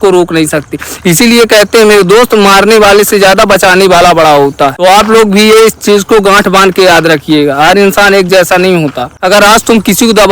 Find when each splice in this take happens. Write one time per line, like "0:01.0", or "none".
0:04.8
0:09.1